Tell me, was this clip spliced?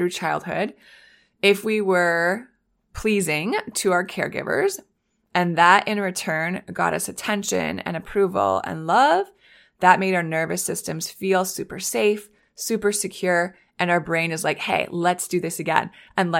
no; 0 cuts

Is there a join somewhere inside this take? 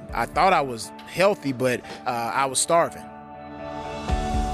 no; 0 cuts

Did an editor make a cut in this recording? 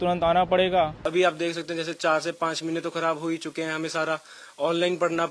yes; 1 cut; at 1.1 s

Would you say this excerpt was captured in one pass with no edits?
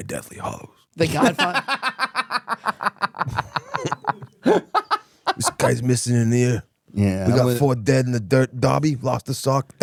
yes; 0 cuts

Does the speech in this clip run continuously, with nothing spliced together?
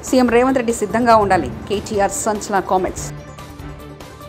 yes; 0 cuts

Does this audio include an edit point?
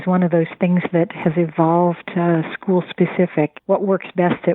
yes; 1 cut; at 3.6 s

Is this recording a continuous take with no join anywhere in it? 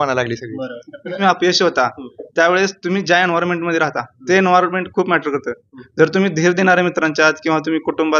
no; 1 cut; at 1.2 s

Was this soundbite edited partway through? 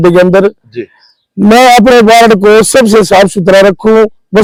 no; 0 cuts

